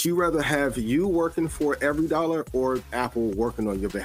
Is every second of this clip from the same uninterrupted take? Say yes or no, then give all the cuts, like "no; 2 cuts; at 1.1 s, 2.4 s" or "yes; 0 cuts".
no; 1 cut; at 2.9 s